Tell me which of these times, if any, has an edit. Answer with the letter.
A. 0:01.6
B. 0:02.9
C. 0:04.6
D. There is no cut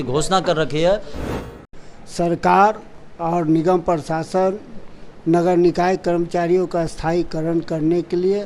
A